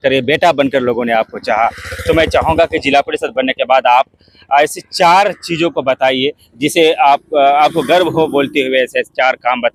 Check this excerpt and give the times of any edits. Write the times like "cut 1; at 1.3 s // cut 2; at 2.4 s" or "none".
none